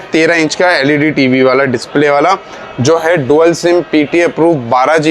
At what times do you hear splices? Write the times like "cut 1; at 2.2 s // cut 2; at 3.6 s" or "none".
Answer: none

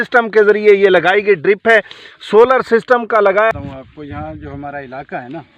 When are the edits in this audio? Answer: cut 1; at 3.5 s

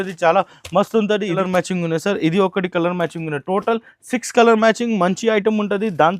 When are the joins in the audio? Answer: cut 1; at 1.4 s

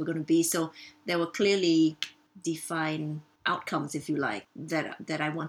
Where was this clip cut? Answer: cut 1; at 3.3 s // cut 2; at 4.4 s

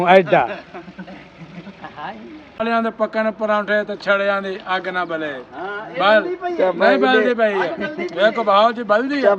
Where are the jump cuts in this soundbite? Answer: cut 1; at 2.6 s

